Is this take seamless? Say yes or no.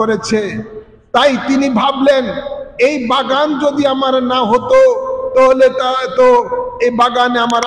yes